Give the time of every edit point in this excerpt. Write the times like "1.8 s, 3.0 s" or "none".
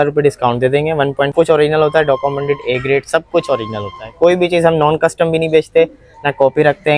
1.3 s

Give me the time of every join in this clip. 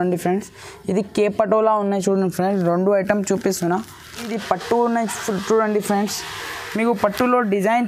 4.3 s

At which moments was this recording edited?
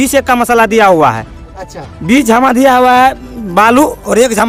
none

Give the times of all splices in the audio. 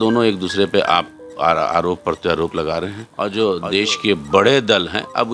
3.0 s

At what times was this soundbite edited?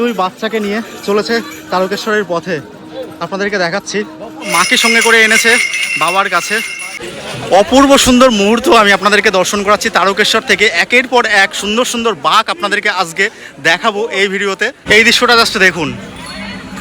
4.5 s, 7.0 s, 14.8 s

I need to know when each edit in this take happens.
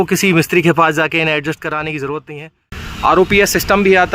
2.8 s

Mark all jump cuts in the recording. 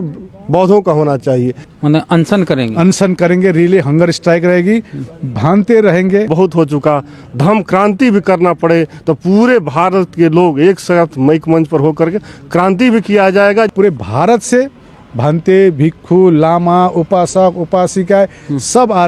1.6 s, 6.3 s, 13.7 s

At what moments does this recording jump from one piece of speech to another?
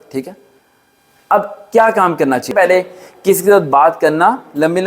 2.5 s

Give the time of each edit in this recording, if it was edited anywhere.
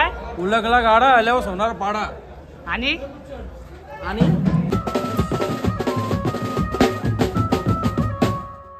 4.7 s

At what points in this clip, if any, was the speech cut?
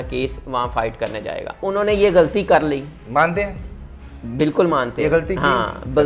1.7 s

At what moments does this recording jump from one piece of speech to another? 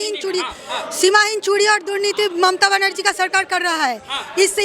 none

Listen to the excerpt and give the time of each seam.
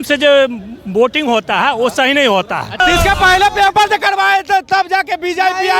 2.8 s

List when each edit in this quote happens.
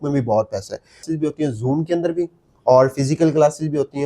1.0 s

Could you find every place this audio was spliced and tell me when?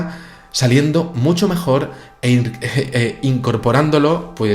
2.5 s

